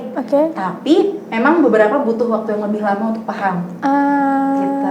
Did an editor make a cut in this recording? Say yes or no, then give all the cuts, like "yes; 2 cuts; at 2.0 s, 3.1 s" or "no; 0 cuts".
no; 0 cuts